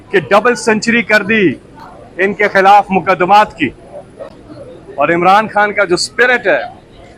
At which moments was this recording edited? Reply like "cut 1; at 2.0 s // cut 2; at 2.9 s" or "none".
none